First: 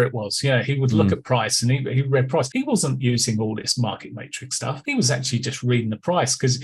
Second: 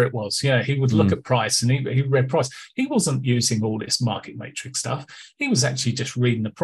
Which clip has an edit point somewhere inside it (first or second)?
first